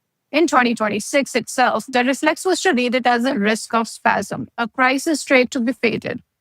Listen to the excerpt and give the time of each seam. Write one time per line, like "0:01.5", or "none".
0:04.4